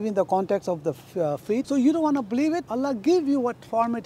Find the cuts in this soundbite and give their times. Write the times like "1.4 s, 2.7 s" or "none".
1.7 s, 2.7 s